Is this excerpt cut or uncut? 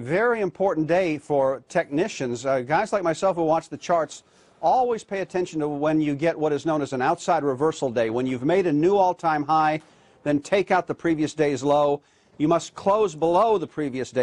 uncut